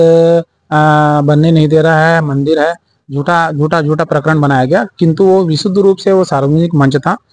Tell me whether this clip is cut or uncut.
uncut